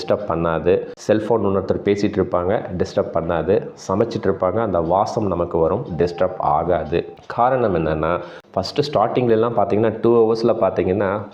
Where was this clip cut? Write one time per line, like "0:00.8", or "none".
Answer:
0:08.4